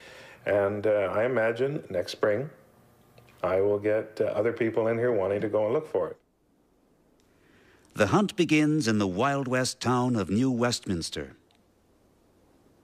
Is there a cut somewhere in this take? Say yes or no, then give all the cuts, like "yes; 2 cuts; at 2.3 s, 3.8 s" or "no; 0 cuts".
yes; 1 cut; at 11.8 s